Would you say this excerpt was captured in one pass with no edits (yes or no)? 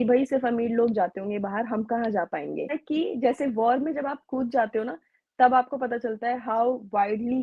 no